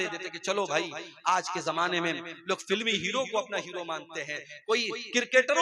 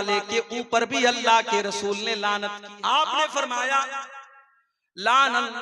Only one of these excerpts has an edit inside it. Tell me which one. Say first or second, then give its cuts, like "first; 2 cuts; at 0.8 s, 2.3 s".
second; 1 cut; at 2.6 s